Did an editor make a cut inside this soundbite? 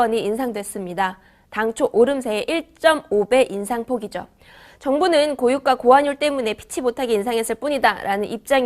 yes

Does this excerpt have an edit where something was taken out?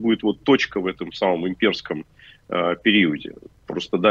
no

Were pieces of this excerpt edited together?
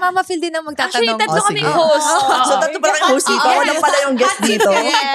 no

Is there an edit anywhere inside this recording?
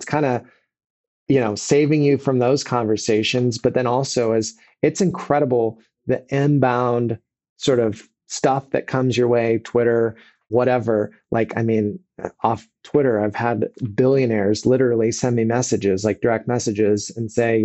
no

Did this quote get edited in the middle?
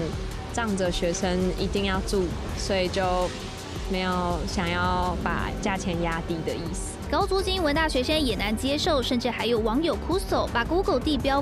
no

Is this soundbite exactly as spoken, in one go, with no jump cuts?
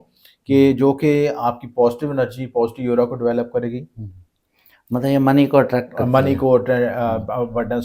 yes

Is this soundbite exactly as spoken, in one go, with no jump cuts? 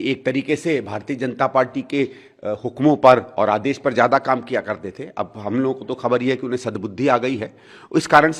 yes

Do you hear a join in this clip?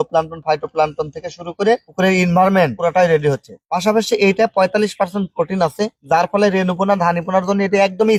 no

